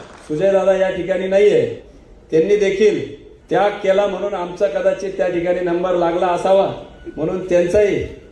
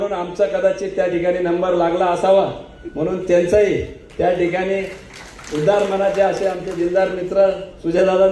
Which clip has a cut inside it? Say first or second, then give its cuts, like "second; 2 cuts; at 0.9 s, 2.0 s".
first; 1 cut; at 1.8 s